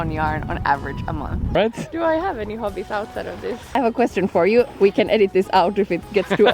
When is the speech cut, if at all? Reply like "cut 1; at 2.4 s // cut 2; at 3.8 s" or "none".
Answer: cut 1; at 1.5 s // cut 2; at 3.6 s // cut 3; at 4.7 s